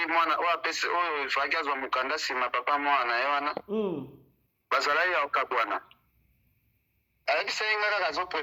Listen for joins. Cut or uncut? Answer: cut